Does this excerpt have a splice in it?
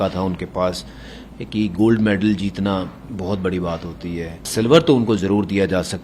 yes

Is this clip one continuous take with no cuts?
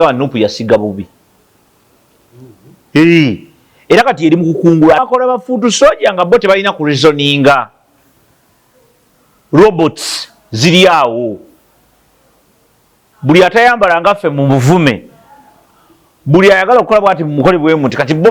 no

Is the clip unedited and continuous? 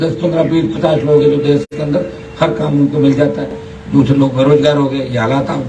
yes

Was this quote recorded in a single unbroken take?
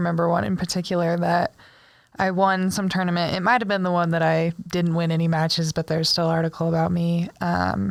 yes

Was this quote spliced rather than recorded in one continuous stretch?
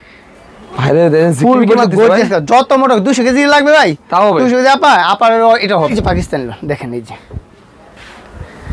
yes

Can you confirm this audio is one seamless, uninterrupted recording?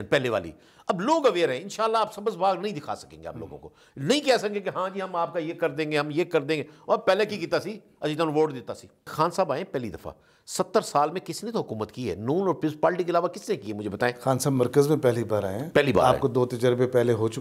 no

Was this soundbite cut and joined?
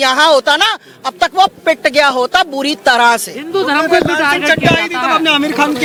no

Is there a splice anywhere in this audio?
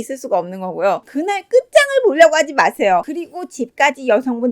yes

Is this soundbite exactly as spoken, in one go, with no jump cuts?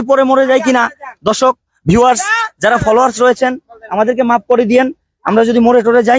yes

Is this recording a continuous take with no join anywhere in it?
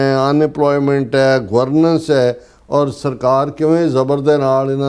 yes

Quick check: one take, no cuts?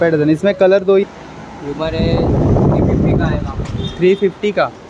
no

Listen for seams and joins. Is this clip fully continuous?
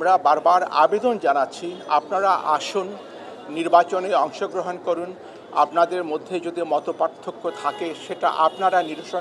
yes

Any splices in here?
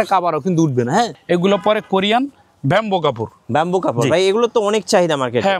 yes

